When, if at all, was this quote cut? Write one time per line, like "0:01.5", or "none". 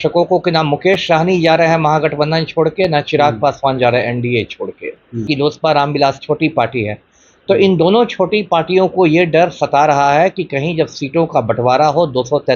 0:05.2